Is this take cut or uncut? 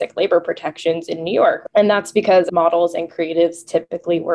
cut